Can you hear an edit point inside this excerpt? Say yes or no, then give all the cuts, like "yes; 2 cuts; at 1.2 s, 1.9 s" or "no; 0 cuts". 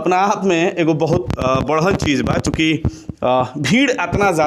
no; 0 cuts